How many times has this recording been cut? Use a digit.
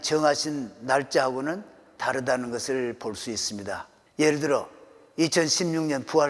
1